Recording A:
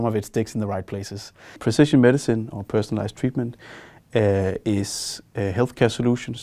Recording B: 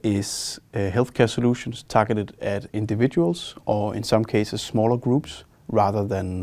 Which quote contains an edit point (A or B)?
A